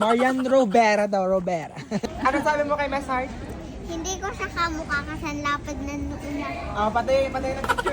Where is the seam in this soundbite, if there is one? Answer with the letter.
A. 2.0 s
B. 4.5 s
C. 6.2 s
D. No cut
A